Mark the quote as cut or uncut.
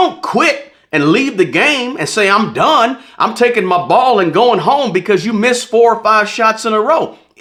uncut